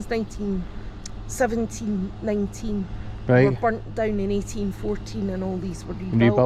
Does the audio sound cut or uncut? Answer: uncut